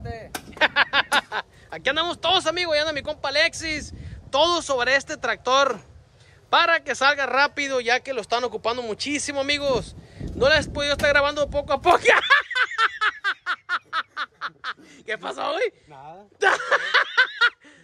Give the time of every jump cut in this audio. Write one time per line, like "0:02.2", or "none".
none